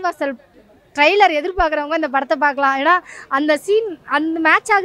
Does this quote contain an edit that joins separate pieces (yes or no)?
no